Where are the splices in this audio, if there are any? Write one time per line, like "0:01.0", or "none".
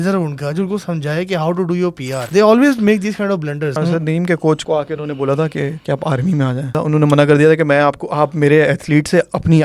0:02.2
0:03.8
0:04.6
0:05.8
0:06.8